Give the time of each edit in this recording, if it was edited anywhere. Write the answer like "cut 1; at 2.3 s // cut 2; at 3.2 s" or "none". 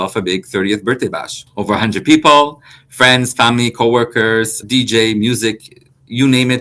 cut 1; at 1.4 s // cut 2; at 4.6 s